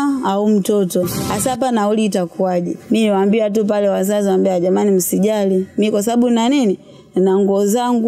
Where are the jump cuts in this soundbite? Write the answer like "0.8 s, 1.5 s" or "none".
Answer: 1.2 s, 2.8 s